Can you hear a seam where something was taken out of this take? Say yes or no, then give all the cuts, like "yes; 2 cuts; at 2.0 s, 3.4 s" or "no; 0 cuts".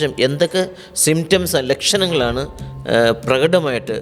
no; 0 cuts